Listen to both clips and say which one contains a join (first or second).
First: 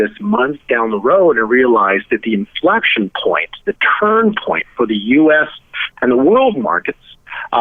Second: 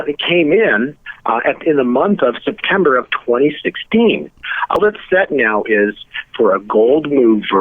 second